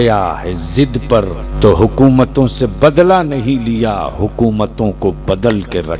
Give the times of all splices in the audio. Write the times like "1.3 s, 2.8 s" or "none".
1.4 s